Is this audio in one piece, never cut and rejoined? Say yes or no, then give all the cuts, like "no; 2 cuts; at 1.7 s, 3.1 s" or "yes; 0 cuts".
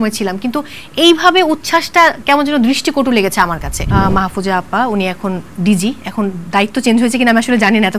no; 1 cut; at 3.9 s